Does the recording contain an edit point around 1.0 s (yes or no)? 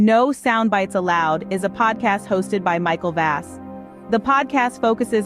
yes